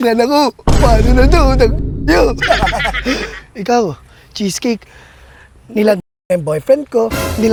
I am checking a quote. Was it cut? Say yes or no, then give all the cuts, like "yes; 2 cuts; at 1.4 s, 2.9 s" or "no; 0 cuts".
no; 0 cuts